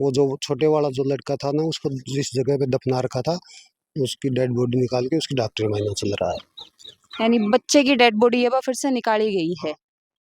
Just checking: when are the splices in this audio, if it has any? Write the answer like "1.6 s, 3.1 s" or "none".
none

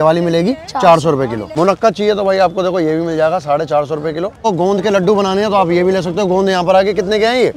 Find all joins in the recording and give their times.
1.4 s, 4.4 s

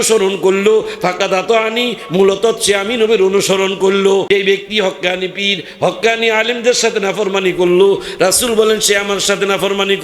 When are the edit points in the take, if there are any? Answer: 4.3 s

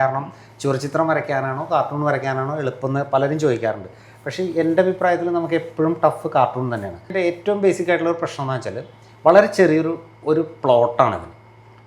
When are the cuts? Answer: 7.1 s

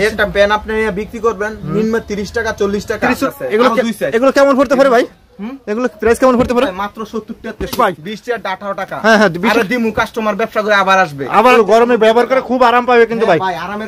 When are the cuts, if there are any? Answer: 3.2 s, 7.7 s, 11.5 s

